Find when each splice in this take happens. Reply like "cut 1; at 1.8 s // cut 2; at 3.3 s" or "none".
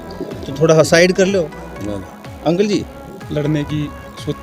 cut 1; at 3.1 s